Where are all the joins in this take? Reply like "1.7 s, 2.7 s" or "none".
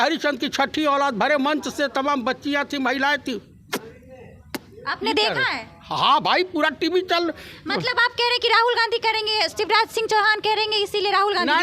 none